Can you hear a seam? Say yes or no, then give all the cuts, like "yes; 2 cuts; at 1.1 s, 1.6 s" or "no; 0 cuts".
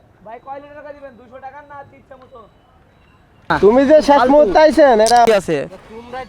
yes; 1 cut; at 3.4 s